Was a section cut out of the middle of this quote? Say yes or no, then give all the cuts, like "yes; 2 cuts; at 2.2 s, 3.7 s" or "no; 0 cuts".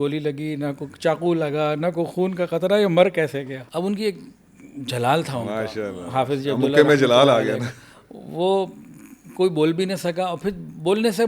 no; 0 cuts